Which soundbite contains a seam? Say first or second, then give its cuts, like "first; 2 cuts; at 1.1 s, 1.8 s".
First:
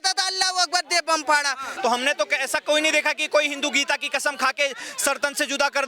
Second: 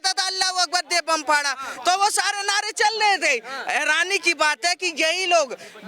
first; 1 cut; at 1.7 s